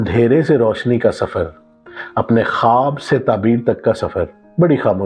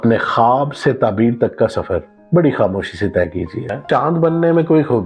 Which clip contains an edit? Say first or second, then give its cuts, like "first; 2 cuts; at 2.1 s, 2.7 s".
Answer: second; 1 cut; at 3.8 s